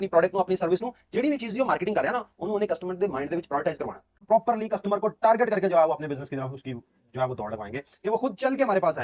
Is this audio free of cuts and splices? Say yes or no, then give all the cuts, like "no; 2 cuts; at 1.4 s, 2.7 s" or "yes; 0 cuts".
no; 1 cut; at 4.2 s